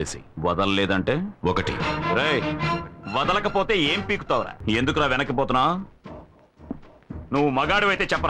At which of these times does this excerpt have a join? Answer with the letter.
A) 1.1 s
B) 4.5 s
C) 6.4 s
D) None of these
B